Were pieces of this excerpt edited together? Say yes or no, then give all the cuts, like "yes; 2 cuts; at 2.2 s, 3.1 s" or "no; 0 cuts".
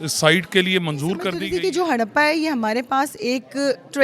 yes; 1 cut; at 1.4 s